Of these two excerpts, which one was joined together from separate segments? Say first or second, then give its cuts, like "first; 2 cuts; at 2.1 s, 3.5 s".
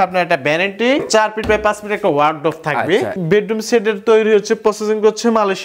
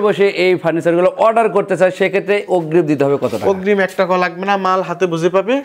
first; 2 cuts; at 1.0 s, 3.1 s